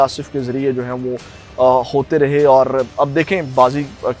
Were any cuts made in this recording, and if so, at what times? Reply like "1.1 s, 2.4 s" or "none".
none